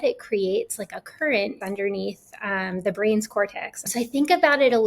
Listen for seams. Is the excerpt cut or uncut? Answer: cut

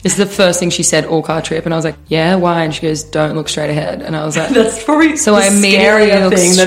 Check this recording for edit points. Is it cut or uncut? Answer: uncut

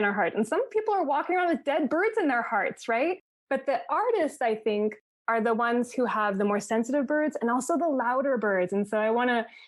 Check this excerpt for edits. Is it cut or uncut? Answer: uncut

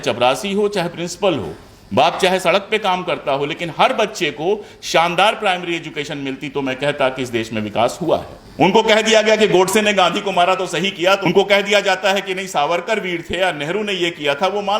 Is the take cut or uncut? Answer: cut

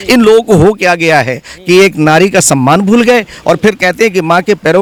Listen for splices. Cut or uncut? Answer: uncut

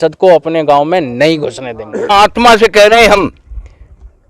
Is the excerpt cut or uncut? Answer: cut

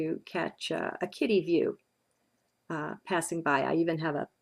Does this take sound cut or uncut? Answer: uncut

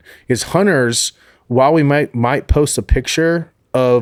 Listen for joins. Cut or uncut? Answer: uncut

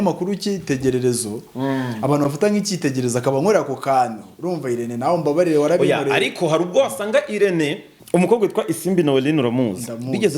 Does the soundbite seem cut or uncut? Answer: cut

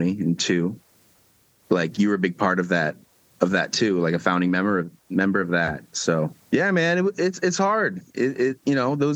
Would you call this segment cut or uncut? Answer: cut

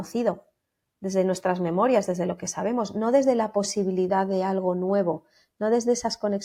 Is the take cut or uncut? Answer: uncut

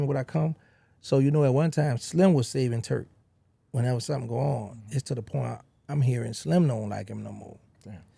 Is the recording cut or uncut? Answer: uncut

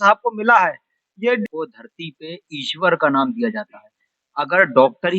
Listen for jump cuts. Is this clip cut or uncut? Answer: cut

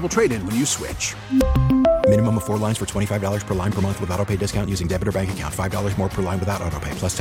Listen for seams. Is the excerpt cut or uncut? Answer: uncut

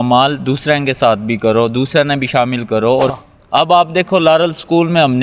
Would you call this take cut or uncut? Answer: cut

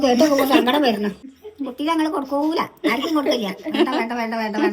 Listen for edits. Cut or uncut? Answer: uncut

